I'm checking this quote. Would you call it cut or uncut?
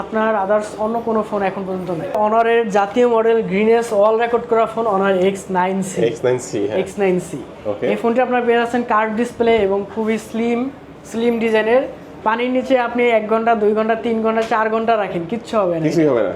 cut